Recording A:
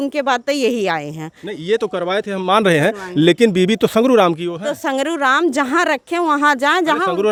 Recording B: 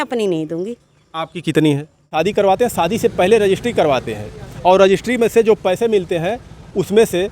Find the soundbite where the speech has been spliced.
B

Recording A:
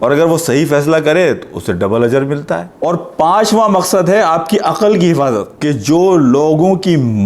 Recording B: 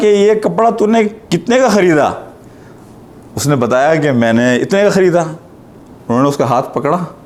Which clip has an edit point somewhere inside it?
A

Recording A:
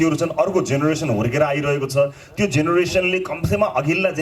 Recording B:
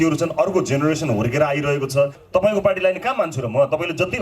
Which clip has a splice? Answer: B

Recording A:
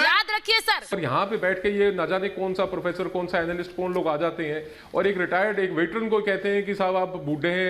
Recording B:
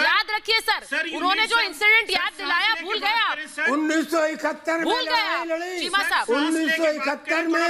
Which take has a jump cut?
A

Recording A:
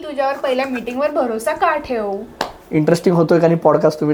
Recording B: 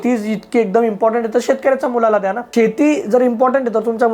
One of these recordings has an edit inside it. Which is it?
B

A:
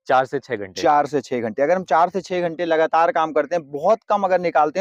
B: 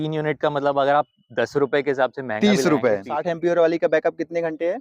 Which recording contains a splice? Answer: B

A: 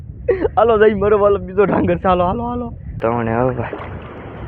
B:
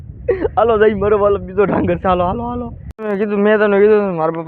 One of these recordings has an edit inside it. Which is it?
A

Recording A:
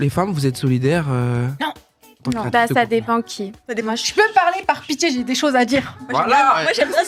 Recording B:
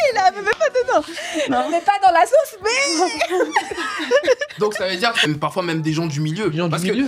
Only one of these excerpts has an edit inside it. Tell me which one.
B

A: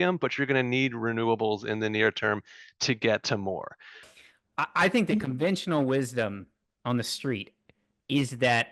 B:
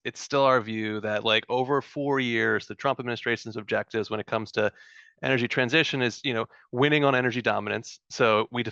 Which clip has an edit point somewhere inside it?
A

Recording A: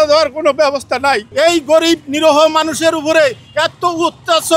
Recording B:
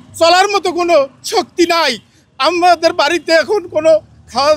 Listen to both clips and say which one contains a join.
A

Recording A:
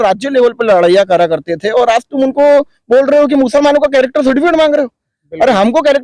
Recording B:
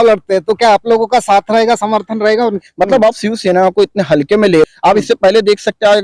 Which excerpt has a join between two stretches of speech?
B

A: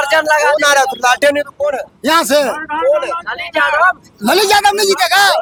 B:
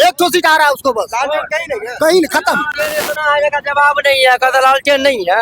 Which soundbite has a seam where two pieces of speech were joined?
B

